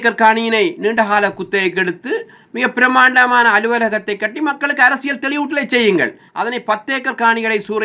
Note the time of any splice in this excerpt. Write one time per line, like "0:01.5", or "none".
0:06.2